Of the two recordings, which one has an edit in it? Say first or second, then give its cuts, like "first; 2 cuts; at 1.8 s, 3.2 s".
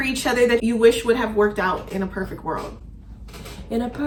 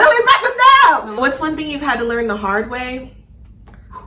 second; 1 cut; at 1.1 s